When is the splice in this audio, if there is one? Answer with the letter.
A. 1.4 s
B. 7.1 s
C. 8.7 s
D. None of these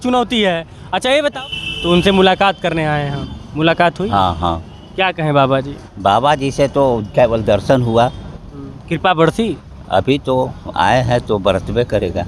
A